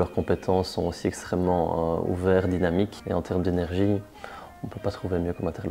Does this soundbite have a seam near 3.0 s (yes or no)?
yes